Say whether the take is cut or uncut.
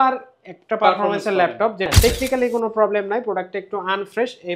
cut